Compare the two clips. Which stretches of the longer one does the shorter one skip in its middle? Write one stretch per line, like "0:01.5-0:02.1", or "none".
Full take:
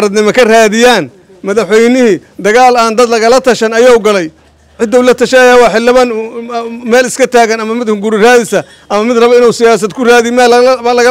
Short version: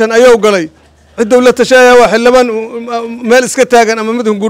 none